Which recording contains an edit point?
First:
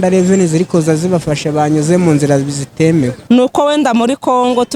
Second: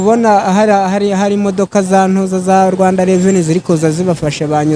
first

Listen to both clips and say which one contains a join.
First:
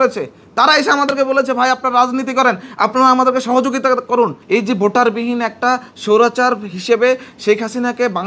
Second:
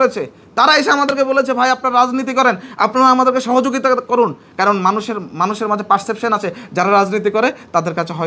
first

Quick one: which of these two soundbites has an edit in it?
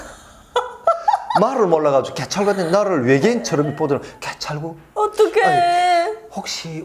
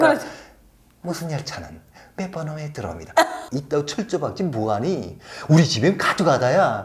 second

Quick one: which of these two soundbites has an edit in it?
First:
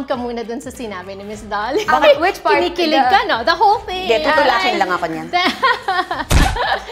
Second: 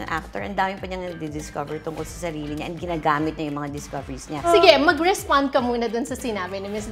second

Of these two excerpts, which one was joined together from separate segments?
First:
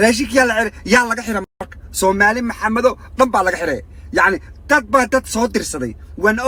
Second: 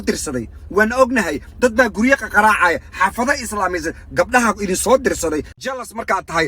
second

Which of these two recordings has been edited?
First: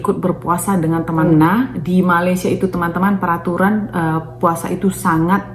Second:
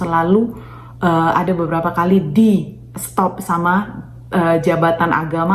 first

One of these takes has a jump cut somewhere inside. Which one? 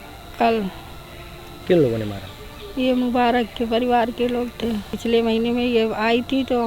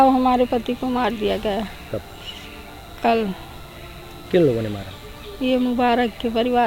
first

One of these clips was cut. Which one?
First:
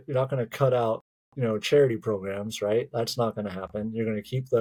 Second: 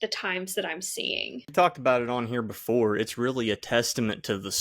second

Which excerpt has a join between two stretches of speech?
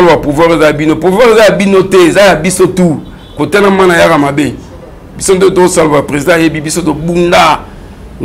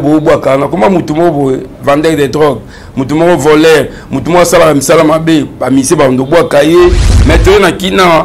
second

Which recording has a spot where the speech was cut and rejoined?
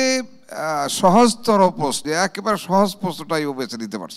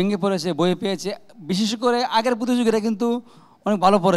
first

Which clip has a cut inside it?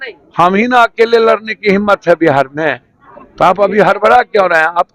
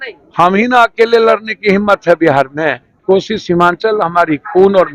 second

